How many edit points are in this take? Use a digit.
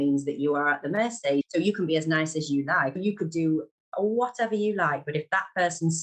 2